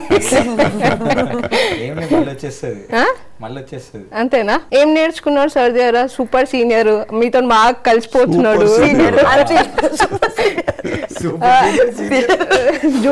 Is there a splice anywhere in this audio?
yes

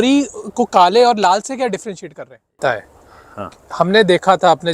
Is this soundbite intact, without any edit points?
no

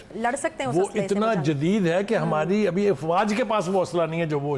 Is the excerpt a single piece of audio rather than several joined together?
yes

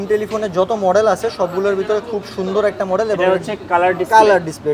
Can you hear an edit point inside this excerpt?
no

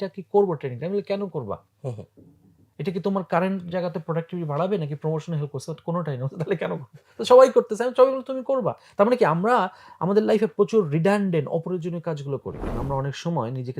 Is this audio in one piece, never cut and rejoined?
no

